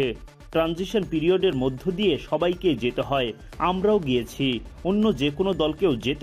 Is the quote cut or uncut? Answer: uncut